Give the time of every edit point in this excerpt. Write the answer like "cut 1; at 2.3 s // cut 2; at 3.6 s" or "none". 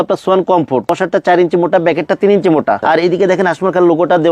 cut 1; at 0.9 s // cut 2; at 2.8 s